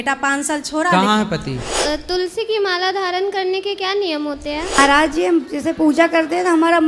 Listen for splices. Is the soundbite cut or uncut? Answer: cut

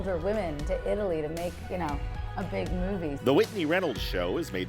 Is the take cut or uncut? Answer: cut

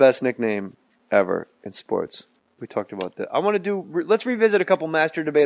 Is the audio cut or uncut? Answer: cut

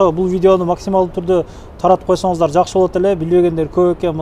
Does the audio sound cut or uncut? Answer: uncut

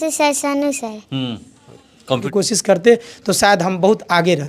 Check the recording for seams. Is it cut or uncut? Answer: cut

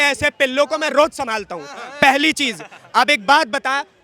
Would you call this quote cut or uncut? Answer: uncut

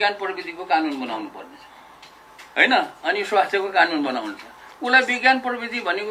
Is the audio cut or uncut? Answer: uncut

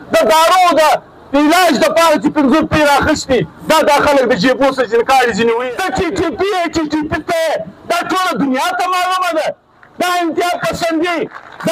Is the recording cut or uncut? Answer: cut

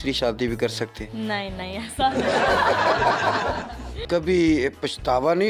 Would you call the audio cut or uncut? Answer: cut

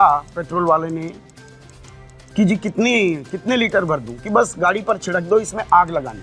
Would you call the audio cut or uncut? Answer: uncut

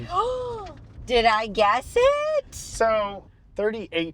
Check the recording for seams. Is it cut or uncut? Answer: cut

